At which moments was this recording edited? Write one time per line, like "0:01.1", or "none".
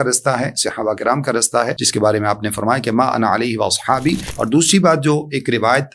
0:01.8
0:04.3